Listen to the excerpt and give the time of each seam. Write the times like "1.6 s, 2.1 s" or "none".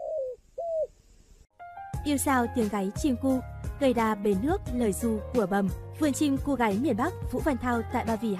none